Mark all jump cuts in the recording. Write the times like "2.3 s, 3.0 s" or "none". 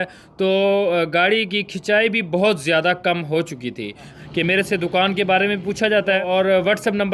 4.1 s, 6.2 s